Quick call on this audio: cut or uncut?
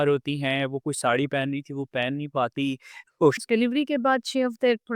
cut